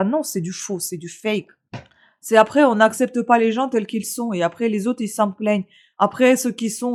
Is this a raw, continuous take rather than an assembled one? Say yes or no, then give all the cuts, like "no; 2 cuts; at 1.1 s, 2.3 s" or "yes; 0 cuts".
yes; 0 cuts